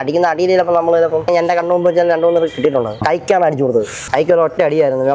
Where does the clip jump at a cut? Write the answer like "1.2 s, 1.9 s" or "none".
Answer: 1.3 s, 3.0 s, 4.0 s